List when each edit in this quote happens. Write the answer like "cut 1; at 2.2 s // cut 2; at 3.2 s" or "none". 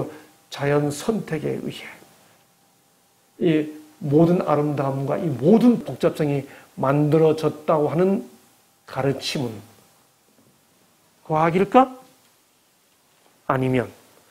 cut 1; at 5.9 s